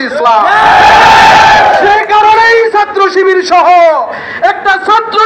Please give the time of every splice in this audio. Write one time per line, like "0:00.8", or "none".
none

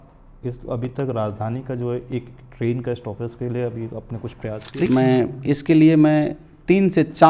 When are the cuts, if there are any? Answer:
0:04.9

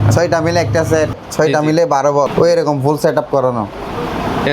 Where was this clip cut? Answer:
0:01.2
0:02.3

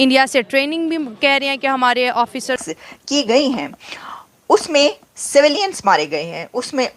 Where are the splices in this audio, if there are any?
0:02.6

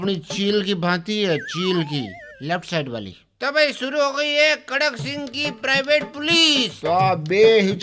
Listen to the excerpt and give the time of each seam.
0:02.3
0:06.7

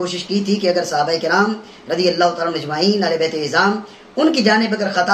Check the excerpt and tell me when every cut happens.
none

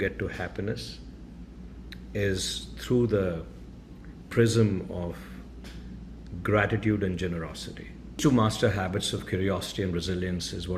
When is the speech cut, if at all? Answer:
0:08.2

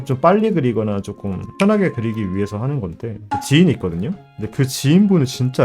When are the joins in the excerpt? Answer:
0:03.2

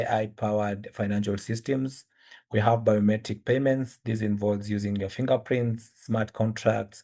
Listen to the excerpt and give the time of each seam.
none

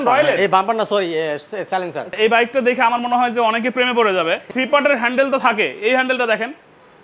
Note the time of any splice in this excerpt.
0:02.0
0:04.5

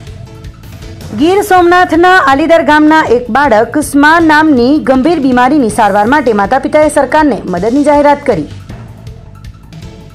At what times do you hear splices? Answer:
0:00.9

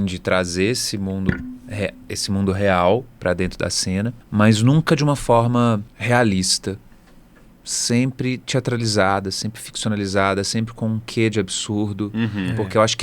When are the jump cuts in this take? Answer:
0:04.2
0:05.9

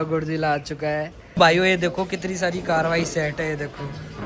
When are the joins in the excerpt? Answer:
0:01.3

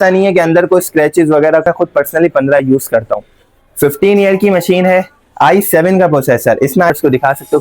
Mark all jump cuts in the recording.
0:01.6
0:06.9

